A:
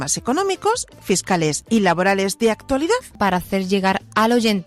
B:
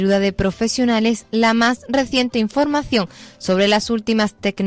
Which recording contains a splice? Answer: A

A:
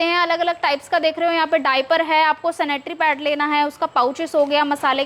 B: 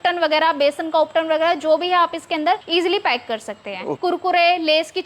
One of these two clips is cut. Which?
B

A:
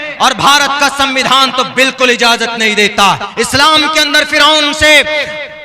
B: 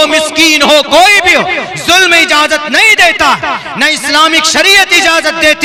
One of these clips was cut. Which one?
A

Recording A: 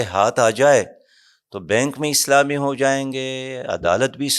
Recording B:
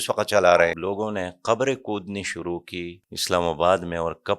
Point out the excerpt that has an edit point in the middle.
B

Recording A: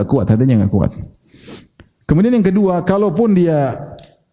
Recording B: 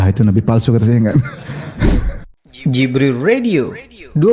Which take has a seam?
B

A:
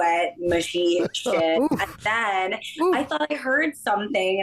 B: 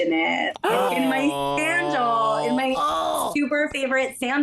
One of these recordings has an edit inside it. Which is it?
B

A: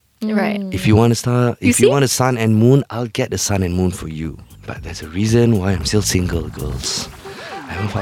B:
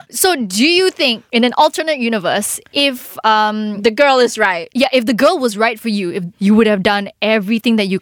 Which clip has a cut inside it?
B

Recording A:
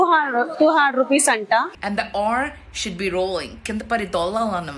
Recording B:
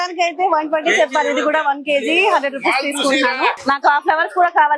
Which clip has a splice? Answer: B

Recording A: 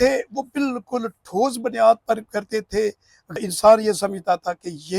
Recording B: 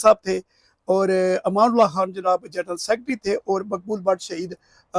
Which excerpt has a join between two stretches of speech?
A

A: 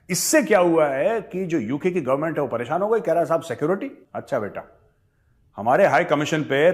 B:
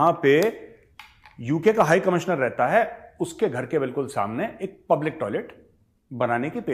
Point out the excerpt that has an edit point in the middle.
A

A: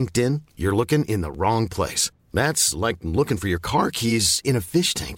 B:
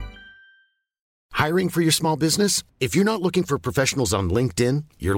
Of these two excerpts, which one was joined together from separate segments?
B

